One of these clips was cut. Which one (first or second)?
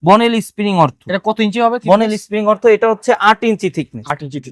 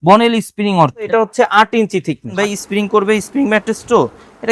second